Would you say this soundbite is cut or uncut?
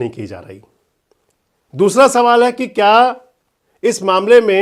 uncut